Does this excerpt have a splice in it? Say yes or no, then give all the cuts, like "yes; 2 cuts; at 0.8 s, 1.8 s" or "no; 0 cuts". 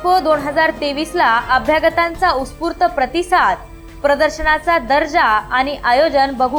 no; 0 cuts